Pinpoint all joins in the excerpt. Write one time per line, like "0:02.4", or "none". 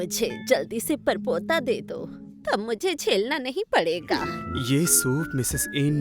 0:04.4